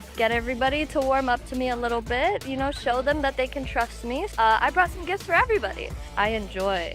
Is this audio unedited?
no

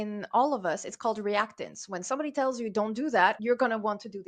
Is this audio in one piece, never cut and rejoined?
no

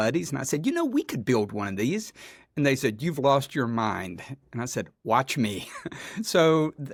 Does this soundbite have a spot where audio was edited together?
no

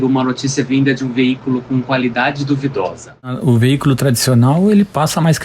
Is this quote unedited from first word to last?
no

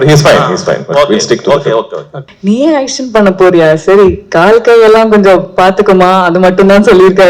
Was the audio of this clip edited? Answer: yes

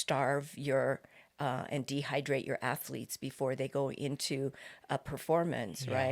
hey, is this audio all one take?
yes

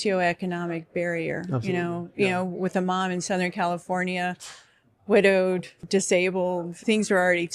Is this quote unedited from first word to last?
no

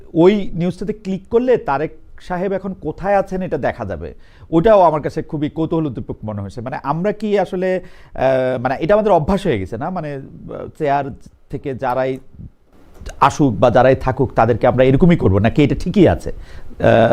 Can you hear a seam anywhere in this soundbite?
no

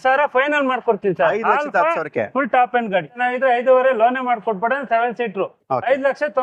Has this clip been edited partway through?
yes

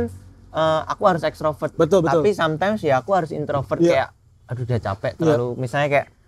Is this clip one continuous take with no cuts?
yes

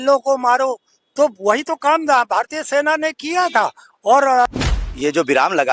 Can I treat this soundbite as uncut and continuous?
no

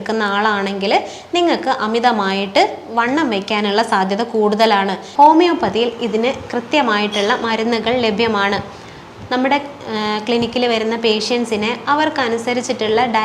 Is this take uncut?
no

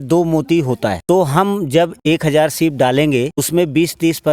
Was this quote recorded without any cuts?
no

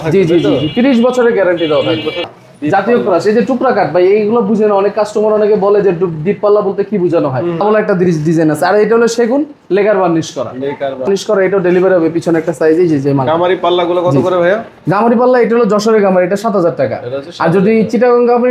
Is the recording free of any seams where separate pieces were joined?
no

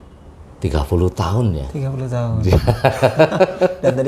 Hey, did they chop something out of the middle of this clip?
no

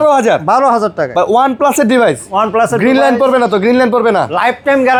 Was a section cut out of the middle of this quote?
no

